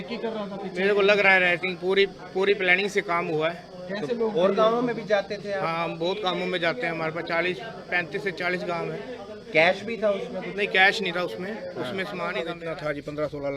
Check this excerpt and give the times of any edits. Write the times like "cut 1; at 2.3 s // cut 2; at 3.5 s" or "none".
cut 1; at 12.4 s